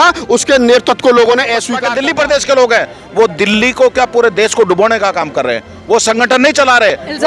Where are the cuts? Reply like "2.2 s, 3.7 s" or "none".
1.8 s